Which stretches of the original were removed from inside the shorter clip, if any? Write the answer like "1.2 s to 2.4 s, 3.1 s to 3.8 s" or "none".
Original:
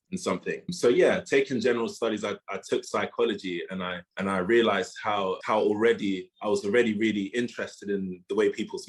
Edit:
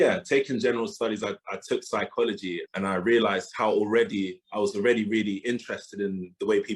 3.7 s to 4.1 s, 4.9 s to 5.4 s